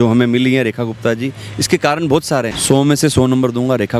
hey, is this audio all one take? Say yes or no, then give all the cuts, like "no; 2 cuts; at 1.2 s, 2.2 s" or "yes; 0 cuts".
no; 1 cut; at 2.5 s